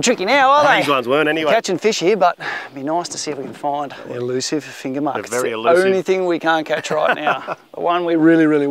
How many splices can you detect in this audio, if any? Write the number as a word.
one